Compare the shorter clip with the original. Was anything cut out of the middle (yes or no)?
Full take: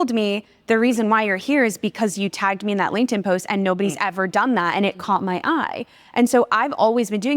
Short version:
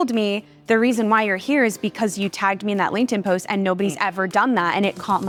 no